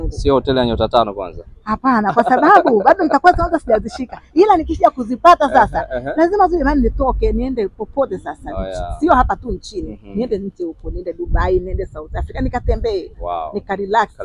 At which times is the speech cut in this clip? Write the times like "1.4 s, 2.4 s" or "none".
none